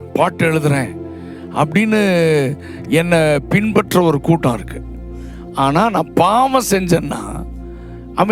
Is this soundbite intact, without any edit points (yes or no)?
yes